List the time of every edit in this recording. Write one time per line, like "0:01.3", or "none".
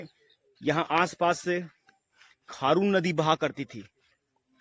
none